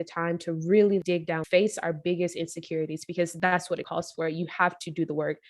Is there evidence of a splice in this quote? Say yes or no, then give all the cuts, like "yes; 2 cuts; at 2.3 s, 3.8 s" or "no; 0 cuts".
yes; 2 cuts; at 1.2 s, 3.4 s